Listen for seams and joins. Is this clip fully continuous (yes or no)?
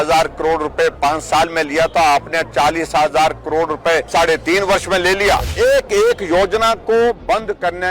no